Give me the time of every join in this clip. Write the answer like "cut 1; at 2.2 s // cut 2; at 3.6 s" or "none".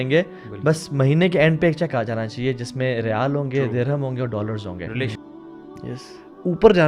cut 1; at 5.4 s